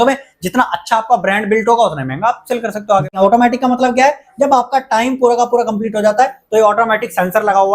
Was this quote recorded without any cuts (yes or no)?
no